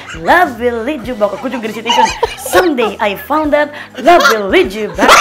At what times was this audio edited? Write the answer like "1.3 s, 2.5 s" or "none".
none